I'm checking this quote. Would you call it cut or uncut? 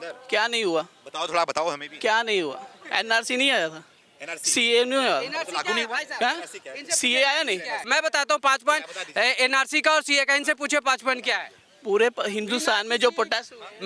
cut